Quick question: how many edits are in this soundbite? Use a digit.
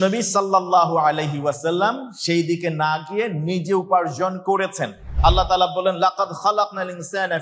1